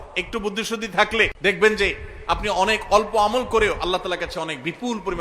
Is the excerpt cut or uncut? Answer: cut